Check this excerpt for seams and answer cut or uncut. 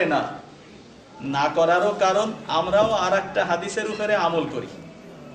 uncut